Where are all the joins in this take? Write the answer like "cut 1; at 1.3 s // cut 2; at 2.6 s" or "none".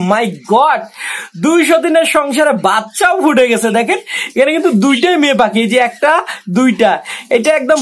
none